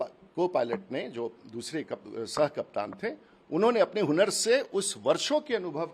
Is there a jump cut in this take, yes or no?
no